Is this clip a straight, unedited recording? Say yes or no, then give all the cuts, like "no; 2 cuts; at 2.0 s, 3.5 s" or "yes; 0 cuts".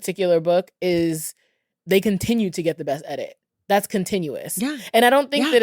no; 1 cut; at 1.7 s